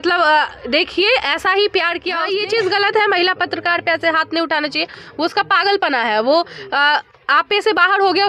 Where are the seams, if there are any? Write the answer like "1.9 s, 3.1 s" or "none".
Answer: 2.2 s